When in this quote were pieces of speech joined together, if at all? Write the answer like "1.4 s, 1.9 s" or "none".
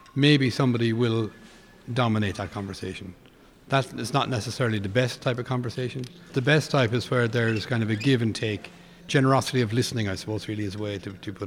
6.1 s, 9.0 s